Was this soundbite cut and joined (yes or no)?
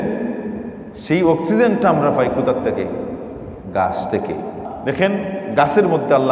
yes